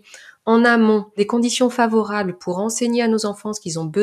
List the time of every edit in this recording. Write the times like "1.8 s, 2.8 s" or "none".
1.1 s